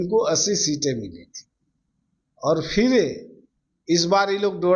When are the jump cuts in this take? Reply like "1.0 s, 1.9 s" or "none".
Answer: none